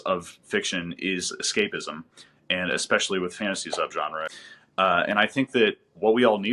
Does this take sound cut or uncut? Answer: cut